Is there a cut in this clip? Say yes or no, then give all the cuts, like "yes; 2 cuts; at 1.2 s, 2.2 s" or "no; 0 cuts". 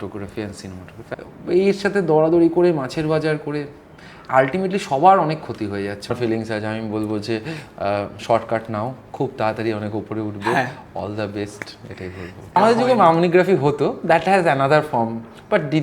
yes; 3 cuts; at 1.0 s, 6.1 s, 12.6 s